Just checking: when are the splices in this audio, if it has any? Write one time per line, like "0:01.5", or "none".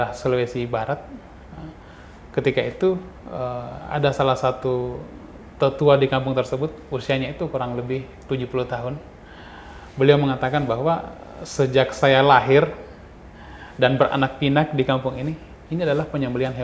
none